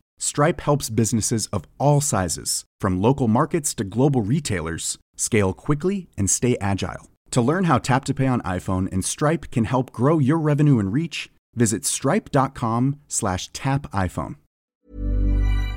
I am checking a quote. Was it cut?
yes; 1 cut; at 14.7 s

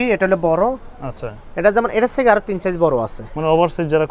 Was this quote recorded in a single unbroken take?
yes; 0 cuts

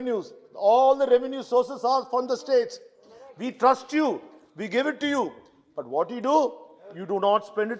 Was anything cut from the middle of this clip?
no; 0 cuts

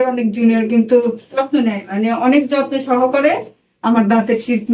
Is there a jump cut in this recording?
yes; 1 cut; at 1.4 s

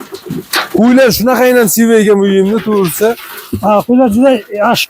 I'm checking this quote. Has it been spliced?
no; 0 cuts

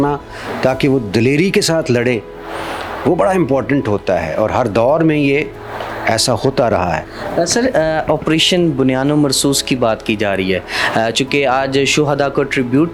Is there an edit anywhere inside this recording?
no; 0 cuts

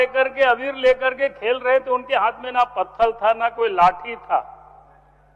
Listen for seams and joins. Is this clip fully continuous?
yes; 0 cuts

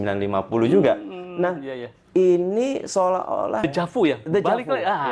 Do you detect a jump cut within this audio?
yes; 1 cut; at 3.7 s

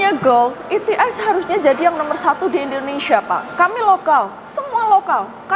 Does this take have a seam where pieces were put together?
no; 0 cuts

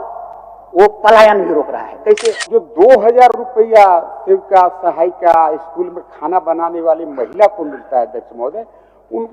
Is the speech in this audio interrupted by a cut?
yes; 1 cut; at 2.3 s

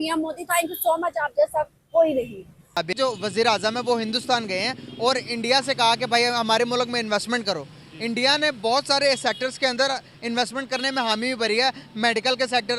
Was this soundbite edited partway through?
yes; 1 cut; at 2.8 s

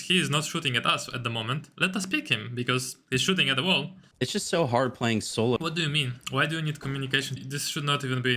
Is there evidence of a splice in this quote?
yes; 3 cuts; at 4.0 s, 5.6 s, 7.4 s

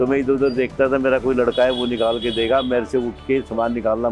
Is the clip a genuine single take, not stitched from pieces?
yes; 0 cuts

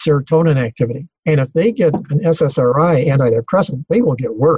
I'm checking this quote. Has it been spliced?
yes; 1 cut; at 1.1 s

